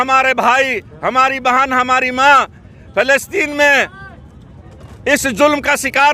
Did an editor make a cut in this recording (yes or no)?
no